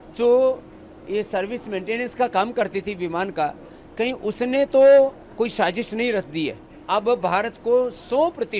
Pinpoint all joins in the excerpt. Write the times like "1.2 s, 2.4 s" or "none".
6.7 s